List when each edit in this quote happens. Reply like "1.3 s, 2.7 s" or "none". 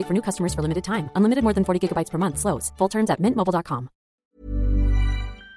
4.3 s